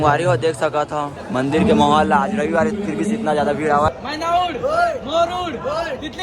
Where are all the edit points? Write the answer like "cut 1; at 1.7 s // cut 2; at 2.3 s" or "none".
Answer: cut 1; at 3.9 s